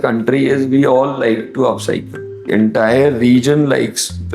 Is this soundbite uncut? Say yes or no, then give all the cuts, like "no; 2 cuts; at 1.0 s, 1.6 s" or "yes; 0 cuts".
no; 1 cut; at 2.5 s